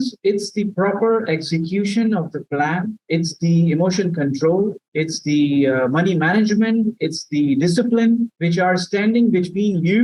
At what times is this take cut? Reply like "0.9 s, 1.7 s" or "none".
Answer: none